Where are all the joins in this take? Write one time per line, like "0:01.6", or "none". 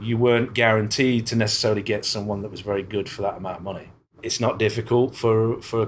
0:04.2

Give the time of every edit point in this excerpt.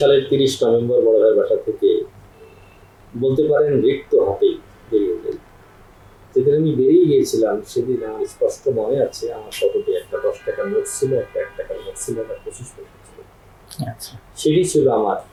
none

